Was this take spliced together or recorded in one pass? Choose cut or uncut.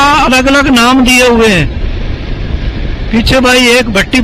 uncut